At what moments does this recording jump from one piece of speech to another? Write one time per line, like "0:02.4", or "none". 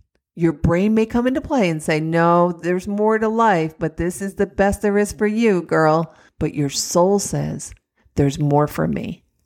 0:06.2